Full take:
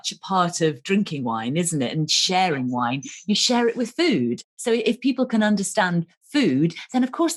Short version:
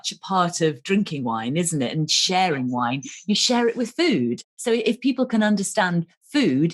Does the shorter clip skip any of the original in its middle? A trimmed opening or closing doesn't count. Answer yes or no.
no